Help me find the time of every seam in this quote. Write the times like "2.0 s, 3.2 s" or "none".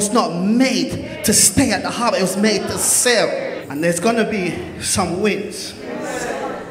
3.6 s